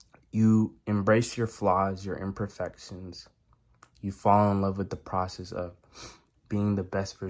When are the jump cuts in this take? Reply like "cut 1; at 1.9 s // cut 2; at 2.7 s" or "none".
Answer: none